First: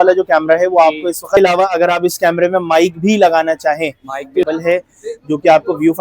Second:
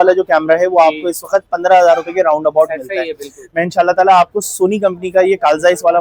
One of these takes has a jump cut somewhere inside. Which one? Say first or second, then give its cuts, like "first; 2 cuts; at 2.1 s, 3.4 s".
first; 2 cuts; at 1.4 s, 4.5 s